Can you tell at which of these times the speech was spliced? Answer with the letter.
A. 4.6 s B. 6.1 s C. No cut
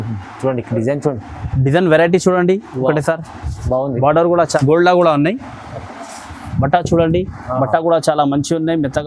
A